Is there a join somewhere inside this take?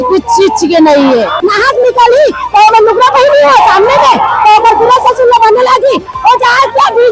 yes; 1 cut; at 1.4 s

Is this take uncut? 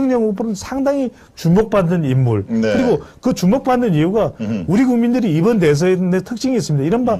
yes; 0 cuts

